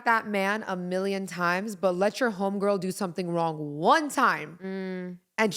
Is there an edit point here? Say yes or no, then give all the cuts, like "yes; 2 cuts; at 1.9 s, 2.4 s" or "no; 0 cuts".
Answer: no; 0 cuts